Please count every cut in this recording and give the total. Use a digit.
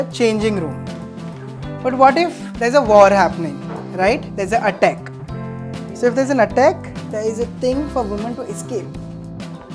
1